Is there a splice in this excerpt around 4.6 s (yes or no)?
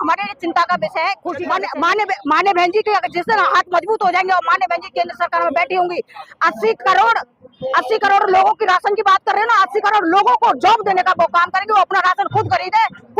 no